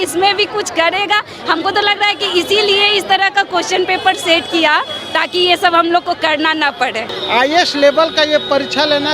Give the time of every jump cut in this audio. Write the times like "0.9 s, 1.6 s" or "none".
7.1 s